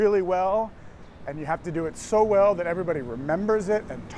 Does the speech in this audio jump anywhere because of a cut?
no; 0 cuts

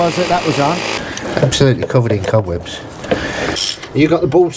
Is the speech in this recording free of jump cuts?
no; 2 cuts; at 0.9 s, 3.7 s

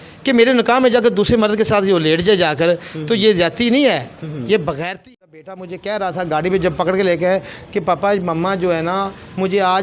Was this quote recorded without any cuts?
no; 1 cut; at 5.1 s

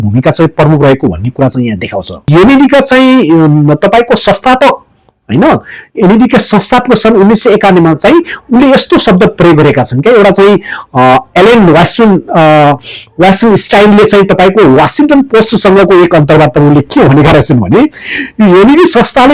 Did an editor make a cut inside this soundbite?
yes; 1 cut; at 2.3 s

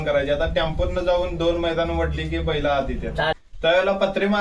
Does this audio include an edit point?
yes; 1 cut; at 3.4 s

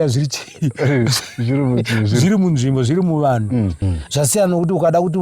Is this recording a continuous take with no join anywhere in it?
no; 1 cut; at 3.8 s

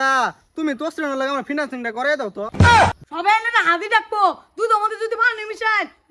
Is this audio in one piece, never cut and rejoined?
no; 2 cuts; at 2.4 s, 3.1 s

